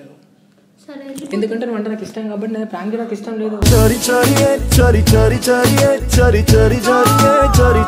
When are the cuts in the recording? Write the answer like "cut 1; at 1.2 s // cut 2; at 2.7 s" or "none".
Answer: none